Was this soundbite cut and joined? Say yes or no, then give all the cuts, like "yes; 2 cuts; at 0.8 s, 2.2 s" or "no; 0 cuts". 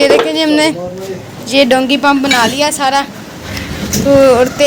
no; 0 cuts